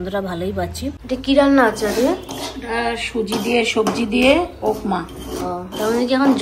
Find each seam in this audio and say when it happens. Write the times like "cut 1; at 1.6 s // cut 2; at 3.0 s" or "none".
cut 1; at 1.0 s